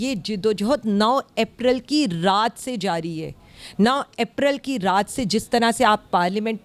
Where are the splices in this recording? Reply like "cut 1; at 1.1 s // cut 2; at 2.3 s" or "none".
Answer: none